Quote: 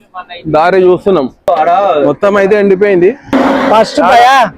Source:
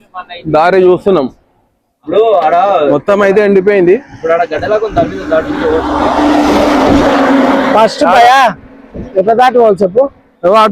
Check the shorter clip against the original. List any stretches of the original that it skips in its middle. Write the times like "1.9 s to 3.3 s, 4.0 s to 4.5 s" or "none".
1.5 s to 2.3 s, 4.2 s to 7.4 s